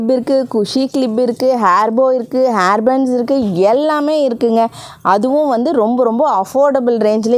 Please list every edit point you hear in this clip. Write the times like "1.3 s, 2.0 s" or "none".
none